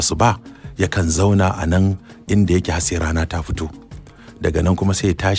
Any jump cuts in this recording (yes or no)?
no